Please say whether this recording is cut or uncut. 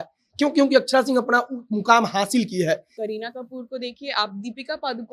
cut